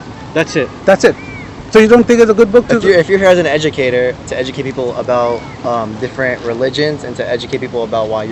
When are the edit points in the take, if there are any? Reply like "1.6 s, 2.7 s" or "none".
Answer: none